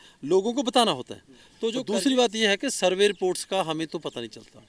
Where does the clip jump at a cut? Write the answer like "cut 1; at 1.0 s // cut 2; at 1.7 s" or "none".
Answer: cut 1; at 1.8 s